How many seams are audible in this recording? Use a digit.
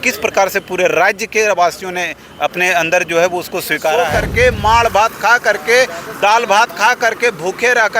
1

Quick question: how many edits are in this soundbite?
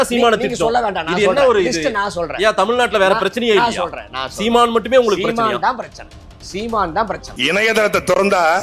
1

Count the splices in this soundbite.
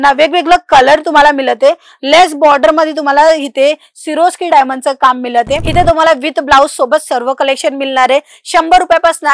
1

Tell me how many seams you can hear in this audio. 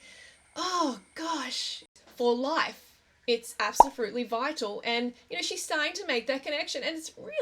1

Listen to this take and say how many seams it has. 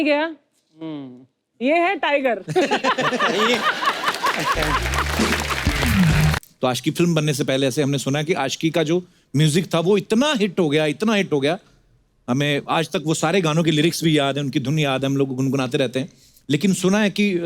1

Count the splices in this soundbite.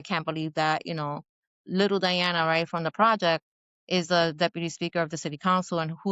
0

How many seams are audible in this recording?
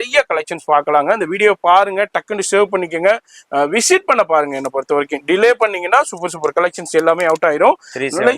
0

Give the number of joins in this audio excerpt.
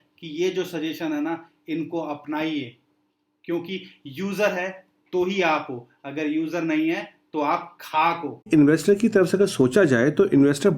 1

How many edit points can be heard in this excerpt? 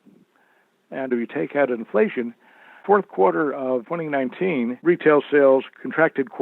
1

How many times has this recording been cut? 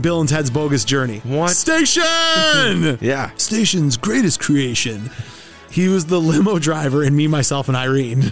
1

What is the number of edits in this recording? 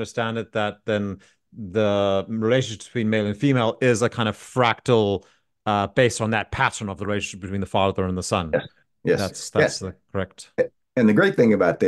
0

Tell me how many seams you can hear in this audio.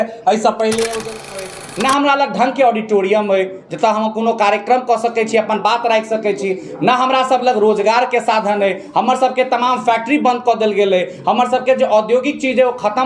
1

